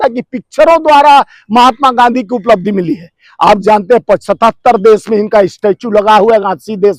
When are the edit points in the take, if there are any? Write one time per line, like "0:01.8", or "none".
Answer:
none